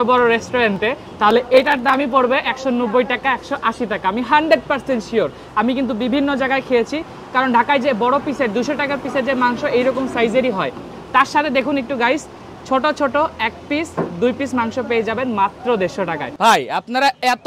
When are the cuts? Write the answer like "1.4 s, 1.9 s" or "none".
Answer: 16.3 s